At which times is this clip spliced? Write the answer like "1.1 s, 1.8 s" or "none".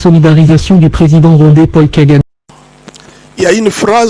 2.2 s